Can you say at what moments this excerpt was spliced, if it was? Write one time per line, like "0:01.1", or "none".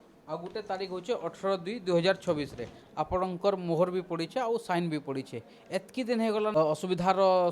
0:06.5